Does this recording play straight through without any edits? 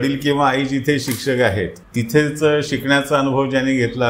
no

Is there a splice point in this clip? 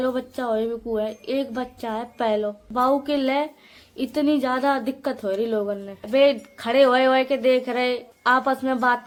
no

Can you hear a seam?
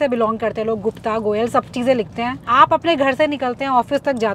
yes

